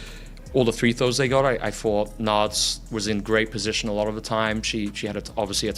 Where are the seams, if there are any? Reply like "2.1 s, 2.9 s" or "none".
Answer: 4.7 s